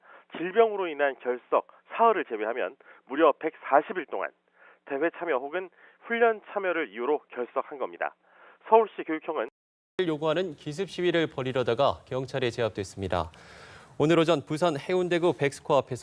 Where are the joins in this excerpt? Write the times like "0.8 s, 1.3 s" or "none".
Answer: 12.9 s